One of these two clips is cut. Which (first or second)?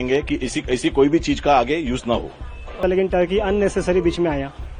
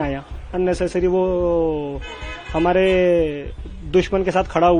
first